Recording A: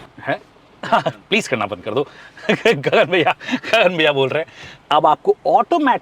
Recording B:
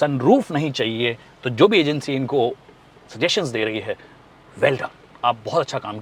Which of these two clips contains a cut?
A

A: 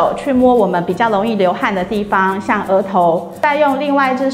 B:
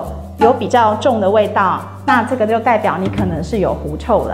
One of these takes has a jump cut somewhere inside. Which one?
A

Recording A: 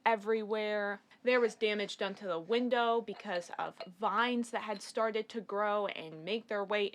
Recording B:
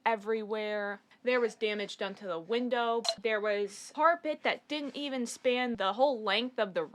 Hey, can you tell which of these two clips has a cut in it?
B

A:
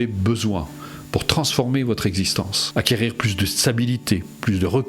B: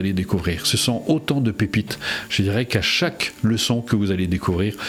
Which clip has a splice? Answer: A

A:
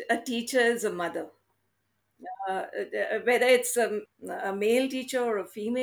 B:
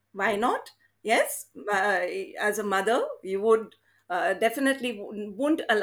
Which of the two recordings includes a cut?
A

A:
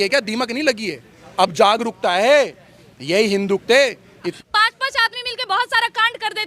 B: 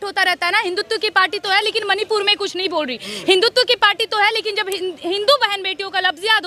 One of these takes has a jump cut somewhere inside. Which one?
A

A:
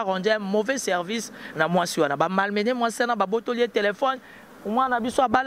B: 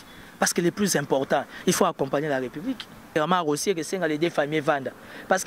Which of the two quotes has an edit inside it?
B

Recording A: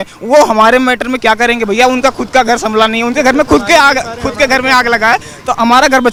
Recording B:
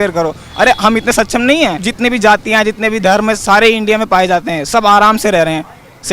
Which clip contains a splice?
B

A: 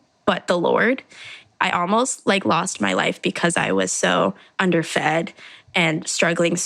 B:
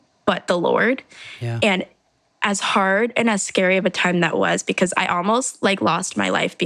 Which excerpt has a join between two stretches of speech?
A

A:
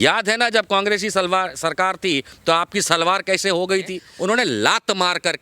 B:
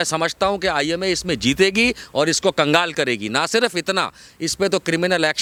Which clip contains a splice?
A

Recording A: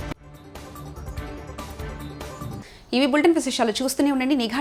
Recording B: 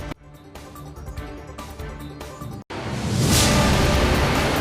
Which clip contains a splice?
B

